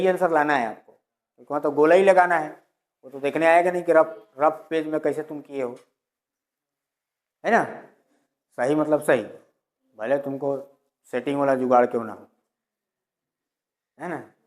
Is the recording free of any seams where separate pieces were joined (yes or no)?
yes